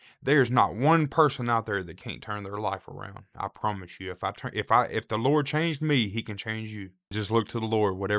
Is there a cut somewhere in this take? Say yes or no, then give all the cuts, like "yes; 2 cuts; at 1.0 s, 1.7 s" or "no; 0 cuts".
yes; 1 cut; at 7.2 s